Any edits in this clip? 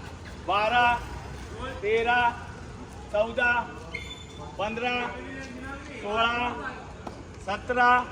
no; 0 cuts

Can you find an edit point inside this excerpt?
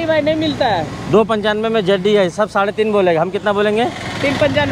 no; 0 cuts

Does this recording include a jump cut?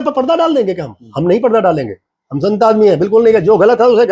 no; 0 cuts

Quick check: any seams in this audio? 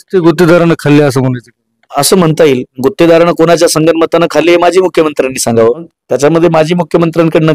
yes; 1 cut; at 5.9 s

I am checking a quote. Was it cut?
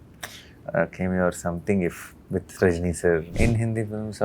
yes; 1 cut; at 3.3 s

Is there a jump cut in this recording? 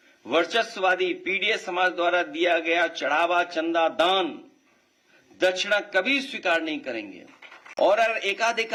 no; 0 cuts

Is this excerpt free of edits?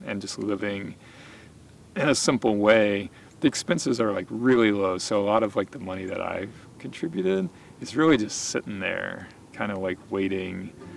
yes; 0 cuts

